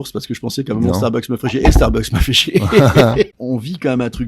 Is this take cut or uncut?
cut